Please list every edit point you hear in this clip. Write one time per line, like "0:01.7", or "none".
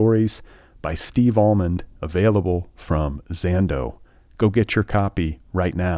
none

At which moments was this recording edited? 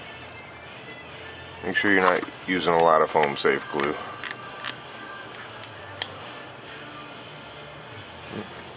0:07.2

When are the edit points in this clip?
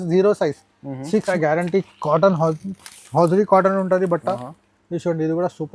0:01.3

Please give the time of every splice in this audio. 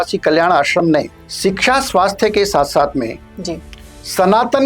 0:01.2

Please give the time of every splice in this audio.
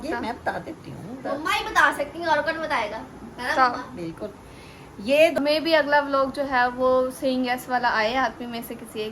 0:05.4

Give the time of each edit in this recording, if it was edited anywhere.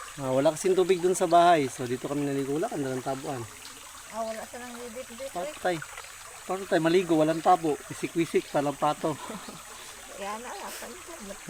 none

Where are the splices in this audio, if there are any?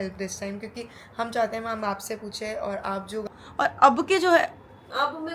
0:03.2

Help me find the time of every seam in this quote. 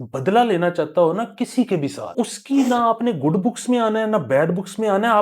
0:02.1

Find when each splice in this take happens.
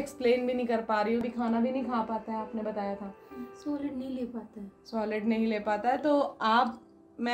0:01.2

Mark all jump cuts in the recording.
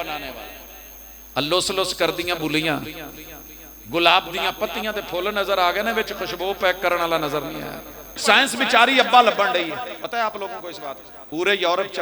0:08.2
0:10.0
0:11.1

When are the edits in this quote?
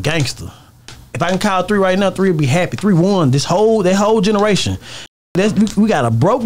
none

